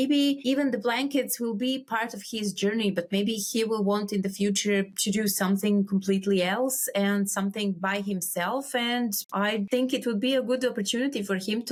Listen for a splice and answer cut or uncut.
uncut